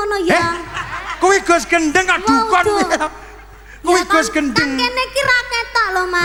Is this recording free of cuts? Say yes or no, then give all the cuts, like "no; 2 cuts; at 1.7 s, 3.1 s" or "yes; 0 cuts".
yes; 0 cuts